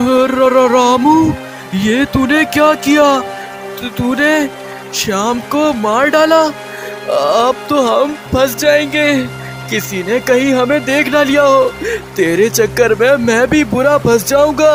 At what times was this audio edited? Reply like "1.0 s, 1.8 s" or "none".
none